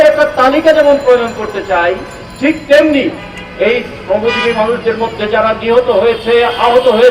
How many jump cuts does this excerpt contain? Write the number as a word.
zero